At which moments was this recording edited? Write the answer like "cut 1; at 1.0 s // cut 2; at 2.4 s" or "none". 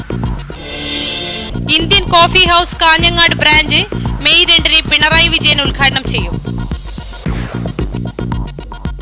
cut 1; at 1.4 s